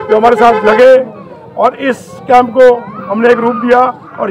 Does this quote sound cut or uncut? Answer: uncut